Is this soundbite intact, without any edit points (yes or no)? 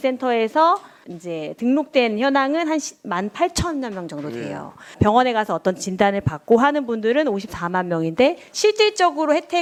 yes